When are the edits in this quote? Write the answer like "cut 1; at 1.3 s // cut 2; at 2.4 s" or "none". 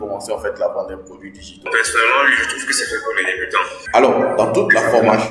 cut 1; at 1.7 s // cut 2; at 3.8 s